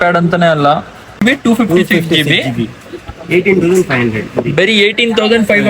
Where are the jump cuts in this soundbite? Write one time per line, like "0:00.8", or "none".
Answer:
0:01.2